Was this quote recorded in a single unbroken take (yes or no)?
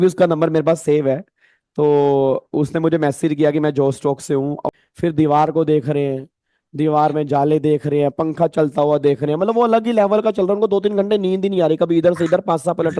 no